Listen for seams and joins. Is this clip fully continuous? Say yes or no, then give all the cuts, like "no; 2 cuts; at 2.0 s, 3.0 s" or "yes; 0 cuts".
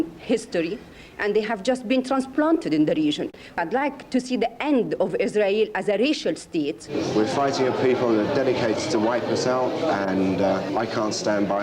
no; 3 cuts; at 3.6 s, 6.9 s, 10.7 s